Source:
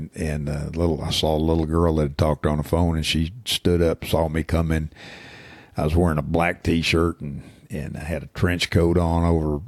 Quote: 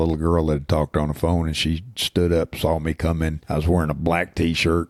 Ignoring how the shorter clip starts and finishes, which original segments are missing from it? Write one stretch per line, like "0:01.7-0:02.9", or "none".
0:04.9-0:05.7